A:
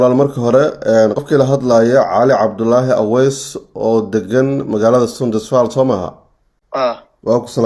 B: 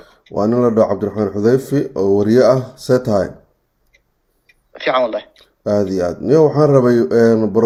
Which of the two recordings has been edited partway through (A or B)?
A